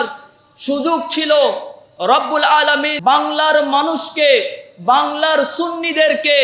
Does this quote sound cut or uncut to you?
cut